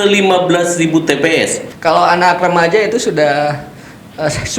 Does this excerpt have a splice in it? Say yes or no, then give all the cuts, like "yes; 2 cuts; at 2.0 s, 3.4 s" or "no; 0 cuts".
yes; 1 cut; at 1.7 s